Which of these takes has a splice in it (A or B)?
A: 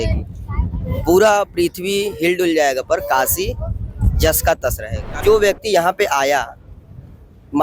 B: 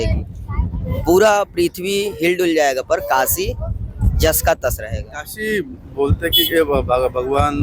A